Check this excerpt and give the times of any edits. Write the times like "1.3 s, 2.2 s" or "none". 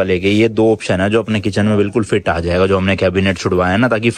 none